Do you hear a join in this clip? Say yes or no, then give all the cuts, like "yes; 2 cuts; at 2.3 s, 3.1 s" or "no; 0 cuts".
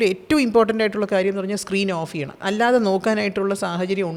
no; 0 cuts